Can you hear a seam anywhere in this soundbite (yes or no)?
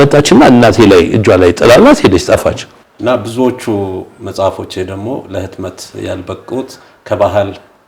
yes